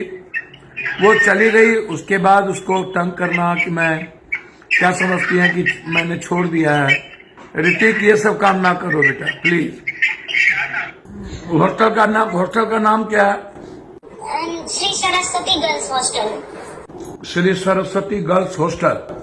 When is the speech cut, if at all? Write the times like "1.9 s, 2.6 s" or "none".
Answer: 11.1 s